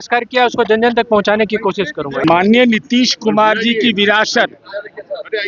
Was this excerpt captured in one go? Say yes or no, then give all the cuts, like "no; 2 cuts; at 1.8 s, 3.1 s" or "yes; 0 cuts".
no; 1 cut; at 2.2 s